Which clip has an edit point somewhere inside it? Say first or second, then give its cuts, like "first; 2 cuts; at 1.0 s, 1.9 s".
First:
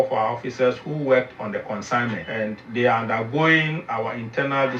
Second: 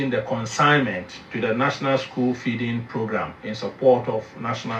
first; 1 cut; at 2.6 s